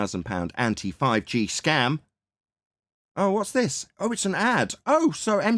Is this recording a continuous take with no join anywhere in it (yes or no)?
yes